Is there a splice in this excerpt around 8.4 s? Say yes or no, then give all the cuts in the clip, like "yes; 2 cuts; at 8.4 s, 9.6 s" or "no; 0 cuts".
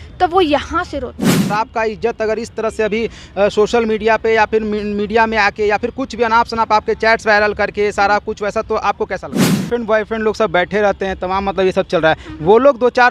no; 2 cuts; at 1.5 s, 9.7 s